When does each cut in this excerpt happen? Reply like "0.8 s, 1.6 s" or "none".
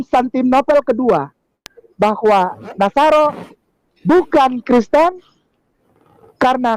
1.8 s

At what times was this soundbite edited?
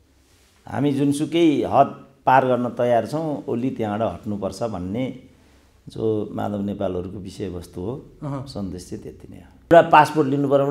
9.7 s

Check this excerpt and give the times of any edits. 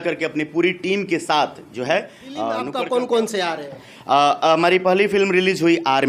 2.7 s

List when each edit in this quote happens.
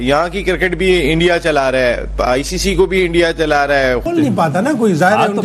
4.1 s

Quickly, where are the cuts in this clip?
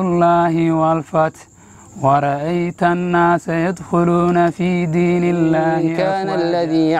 5.9 s

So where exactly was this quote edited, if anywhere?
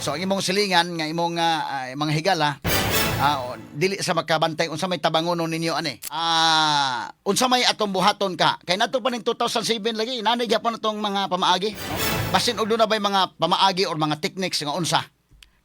6.2 s, 11.9 s

